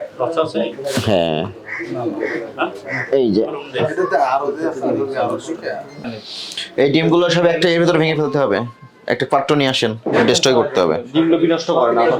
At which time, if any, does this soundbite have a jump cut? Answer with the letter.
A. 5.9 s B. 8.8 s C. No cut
A